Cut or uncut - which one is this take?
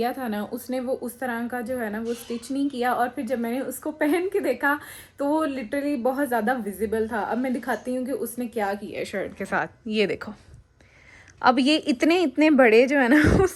uncut